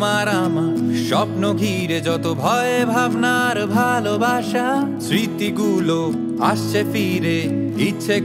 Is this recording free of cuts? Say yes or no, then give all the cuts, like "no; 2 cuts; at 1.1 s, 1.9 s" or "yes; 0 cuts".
yes; 0 cuts